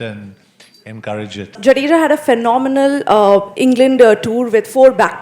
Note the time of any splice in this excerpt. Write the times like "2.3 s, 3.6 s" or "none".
1.6 s